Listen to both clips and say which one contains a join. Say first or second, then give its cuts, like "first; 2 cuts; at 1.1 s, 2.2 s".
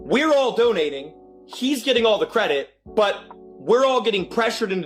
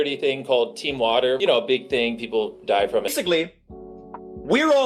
second; 2 cuts; at 1.4 s, 3.1 s